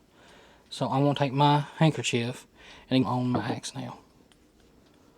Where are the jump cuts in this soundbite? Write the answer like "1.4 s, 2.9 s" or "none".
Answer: 3.0 s